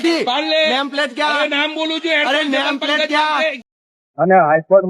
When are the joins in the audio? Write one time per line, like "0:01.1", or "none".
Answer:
0:03.7